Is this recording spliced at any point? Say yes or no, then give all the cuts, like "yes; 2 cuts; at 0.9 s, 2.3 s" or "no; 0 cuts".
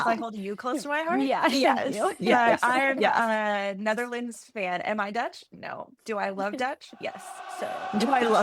no; 0 cuts